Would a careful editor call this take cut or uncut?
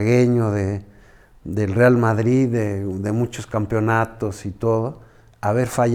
uncut